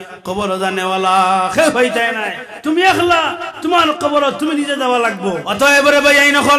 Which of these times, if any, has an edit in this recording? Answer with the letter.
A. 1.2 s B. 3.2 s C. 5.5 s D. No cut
C